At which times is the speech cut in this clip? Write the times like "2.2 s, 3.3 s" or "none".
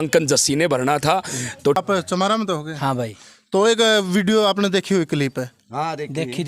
1.8 s